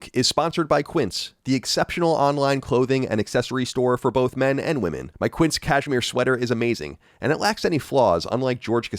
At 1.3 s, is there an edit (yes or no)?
no